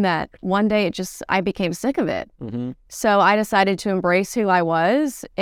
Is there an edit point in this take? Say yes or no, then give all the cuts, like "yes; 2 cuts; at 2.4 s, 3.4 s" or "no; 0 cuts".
no; 0 cuts